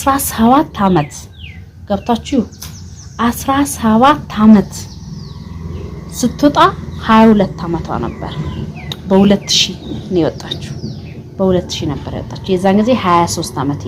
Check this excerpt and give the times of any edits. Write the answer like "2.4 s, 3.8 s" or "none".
none